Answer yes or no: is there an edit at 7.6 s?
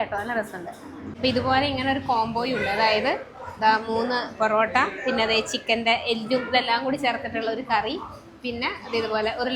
no